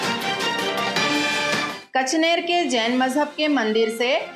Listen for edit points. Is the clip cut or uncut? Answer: cut